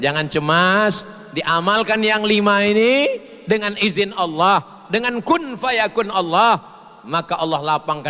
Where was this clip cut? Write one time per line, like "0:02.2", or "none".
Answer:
none